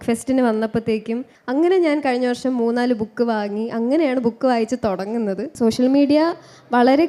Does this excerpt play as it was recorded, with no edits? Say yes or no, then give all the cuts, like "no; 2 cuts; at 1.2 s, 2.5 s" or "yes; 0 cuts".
no; 2 cuts; at 1.3 s, 5.5 s